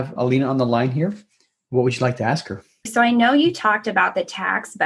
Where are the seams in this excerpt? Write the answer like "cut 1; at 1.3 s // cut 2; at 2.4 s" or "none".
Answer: cut 1; at 2.9 s